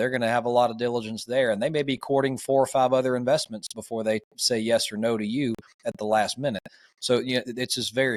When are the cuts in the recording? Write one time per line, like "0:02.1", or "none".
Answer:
none